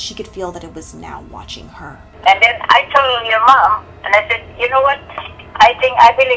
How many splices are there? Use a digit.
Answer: 1